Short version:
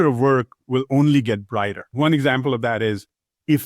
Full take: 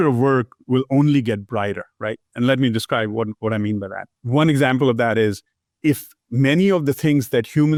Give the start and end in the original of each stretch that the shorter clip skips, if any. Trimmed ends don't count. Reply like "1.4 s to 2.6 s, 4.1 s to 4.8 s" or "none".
1.8 s to 4.2 s